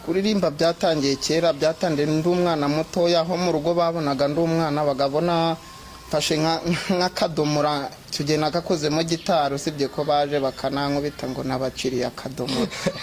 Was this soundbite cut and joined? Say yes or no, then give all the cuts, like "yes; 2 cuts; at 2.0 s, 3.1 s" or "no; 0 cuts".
no; 0 cuts